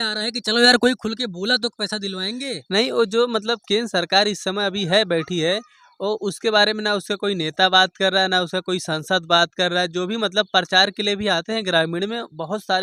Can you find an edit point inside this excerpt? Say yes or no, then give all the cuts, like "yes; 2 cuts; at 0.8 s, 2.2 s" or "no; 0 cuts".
no; 0 cuts